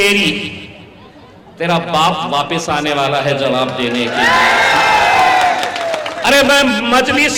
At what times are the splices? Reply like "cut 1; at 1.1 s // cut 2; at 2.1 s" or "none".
cut 1; at 6.1 s